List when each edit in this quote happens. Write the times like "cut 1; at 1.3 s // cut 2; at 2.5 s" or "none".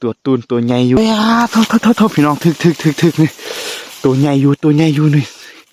cut 1; at 1.0 s